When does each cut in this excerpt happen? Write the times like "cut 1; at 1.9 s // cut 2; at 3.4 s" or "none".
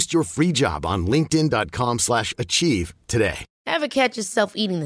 cut 1; at 3.5 s